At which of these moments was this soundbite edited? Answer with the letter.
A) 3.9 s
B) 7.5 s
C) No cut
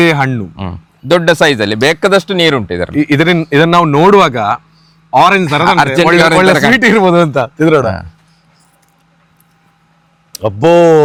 C